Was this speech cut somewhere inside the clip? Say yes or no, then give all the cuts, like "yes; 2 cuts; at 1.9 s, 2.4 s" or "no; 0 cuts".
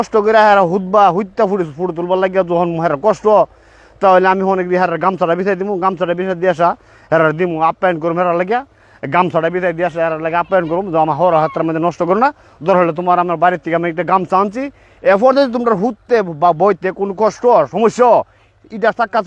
no; 0 cuts